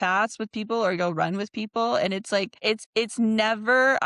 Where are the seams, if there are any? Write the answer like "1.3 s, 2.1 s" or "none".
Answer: 2.5 s